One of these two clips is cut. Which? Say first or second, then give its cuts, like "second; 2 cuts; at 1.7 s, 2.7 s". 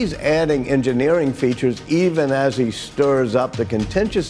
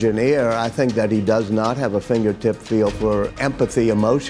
second; 1 cut; at 3.3 s